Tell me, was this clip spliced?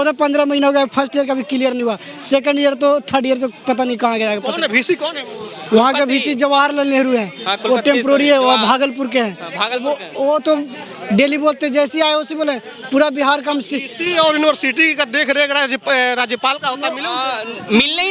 no; 0 cuts

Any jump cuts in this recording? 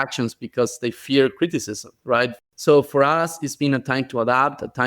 yes; 1 cut; at 2.4 s

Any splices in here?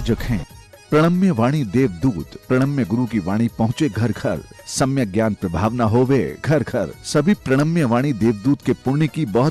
no; 0 cuts

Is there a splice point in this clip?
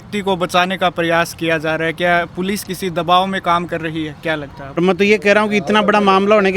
yes; 1 cut; at 4.8 s

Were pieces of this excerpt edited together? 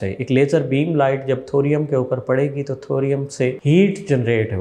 yes; 1 cut; at 3.6 s

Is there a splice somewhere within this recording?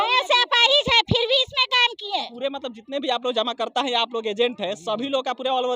yes; 1 cut; at 2.3 s

